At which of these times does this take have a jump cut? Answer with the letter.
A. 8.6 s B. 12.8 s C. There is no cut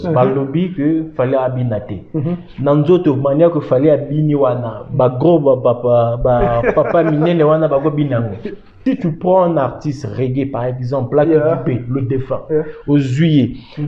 A